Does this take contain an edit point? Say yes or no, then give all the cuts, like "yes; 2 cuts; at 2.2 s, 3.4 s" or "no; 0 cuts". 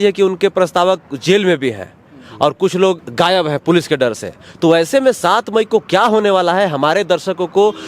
yes; 1 cut; at 3.0 s